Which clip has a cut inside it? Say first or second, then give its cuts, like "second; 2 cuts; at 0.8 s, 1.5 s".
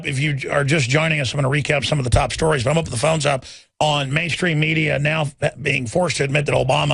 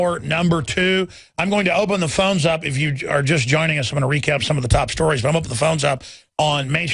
first; 1 cut; at 5.9 s